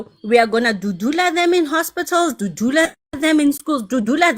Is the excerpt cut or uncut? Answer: uncut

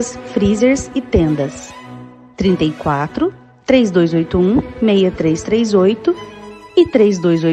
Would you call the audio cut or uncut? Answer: uncut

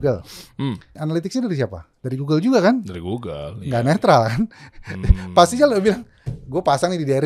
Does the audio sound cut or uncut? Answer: cut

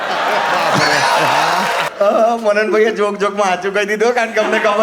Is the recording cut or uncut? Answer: cut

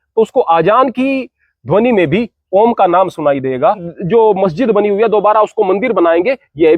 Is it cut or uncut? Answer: cut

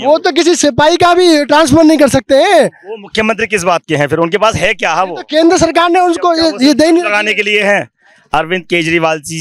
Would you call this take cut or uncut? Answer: uncut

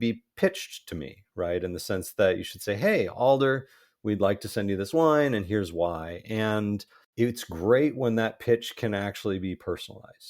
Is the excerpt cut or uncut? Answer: cut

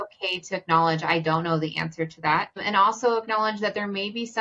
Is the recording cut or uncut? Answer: cut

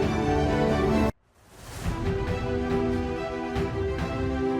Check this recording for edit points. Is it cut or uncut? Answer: cut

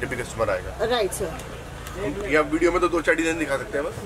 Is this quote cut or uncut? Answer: uncut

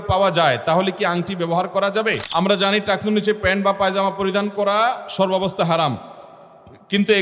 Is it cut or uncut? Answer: cut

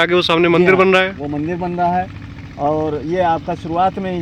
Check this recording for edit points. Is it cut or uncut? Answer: uncut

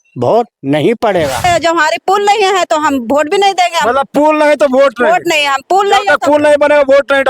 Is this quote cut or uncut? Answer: cut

